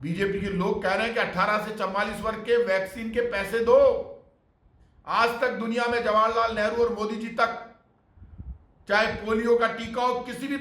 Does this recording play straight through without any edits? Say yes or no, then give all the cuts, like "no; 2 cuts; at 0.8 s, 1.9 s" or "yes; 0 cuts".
yes; 0 cuts